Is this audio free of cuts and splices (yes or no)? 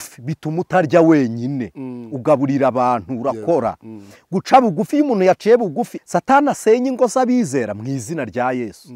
no